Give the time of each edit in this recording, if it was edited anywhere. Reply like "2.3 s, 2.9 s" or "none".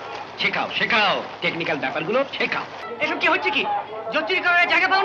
2.8 s